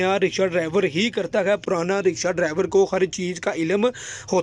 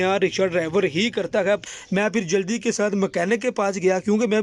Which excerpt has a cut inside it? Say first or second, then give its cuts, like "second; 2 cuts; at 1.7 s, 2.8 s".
second; 1 cut; at 1.6 s